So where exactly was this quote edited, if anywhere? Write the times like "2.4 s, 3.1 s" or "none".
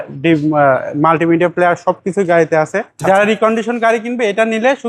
2.9 s

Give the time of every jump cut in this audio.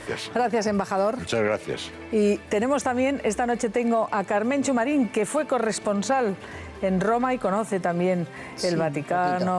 1.3 s

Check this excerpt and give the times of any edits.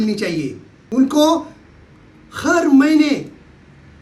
none

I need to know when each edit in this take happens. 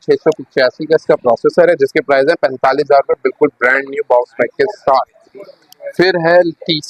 none

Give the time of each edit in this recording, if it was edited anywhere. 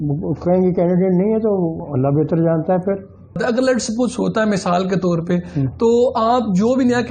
1.8 s, 3.4 s

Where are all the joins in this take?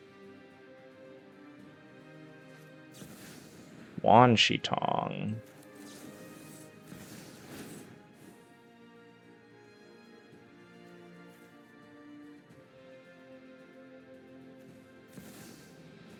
none

